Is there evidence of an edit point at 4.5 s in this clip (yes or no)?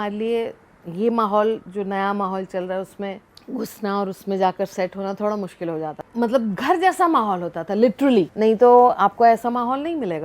no